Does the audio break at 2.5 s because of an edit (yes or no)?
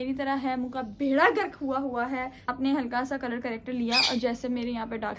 yes